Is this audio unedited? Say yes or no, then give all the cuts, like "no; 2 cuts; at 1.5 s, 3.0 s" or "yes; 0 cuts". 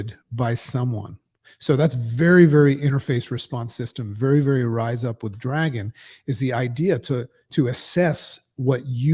yes; 0 cuts